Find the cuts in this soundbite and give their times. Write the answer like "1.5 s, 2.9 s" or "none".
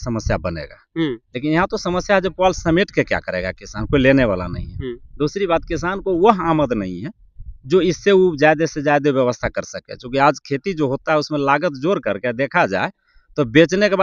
none